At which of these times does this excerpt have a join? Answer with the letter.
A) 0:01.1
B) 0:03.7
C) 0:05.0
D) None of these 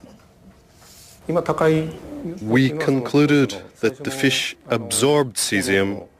B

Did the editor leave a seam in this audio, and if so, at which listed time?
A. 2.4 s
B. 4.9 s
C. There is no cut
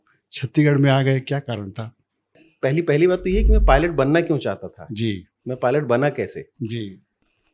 A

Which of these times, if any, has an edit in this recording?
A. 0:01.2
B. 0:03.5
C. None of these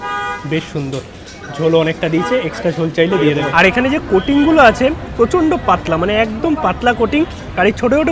B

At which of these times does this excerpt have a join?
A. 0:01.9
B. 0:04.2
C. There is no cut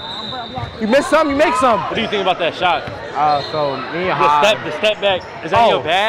A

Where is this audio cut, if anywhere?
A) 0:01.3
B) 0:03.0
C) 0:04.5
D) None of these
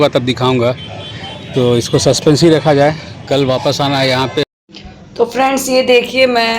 C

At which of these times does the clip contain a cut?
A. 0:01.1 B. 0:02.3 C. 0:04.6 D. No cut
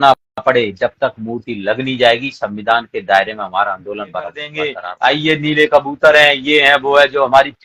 C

